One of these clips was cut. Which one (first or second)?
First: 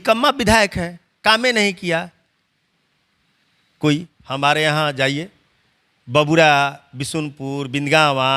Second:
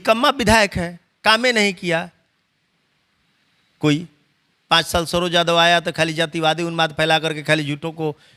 first